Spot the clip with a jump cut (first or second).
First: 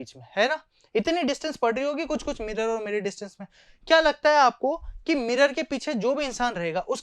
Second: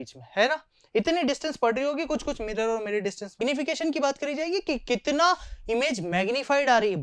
second